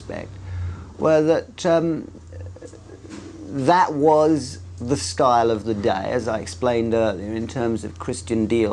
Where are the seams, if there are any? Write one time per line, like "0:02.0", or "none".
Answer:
0:07.7